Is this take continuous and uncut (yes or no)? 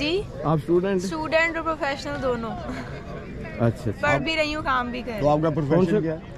yes